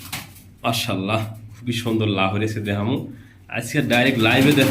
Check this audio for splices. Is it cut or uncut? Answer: uncut